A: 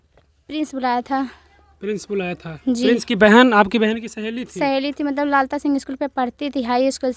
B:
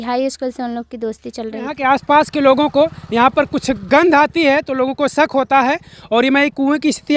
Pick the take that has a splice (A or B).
B